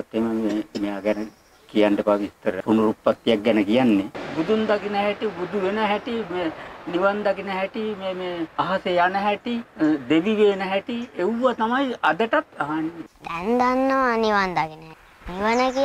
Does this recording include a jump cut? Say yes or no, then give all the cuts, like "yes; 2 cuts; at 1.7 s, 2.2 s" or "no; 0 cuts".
yes; 6 cuts; at 2.6 s, 4.2 s, 8.5 s, 9.7 s, 12.9 s, 14.9 s